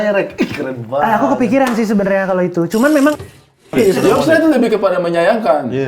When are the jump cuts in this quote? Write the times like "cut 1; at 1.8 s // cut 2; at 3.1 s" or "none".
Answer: cut 1; at 3.7 s